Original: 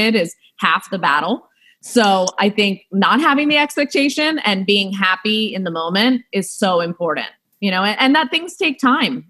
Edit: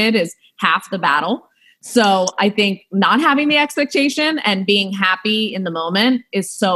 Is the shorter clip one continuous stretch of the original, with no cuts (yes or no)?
yes